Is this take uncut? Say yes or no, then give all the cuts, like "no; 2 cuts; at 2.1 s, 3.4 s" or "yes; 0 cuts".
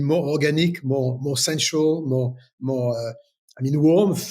yes; 0 cuts